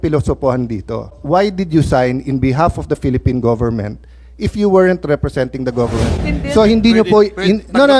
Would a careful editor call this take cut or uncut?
cut